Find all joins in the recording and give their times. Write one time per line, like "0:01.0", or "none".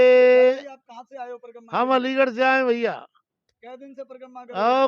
none